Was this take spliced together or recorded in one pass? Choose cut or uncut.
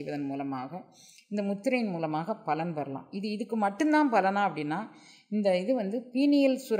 uncut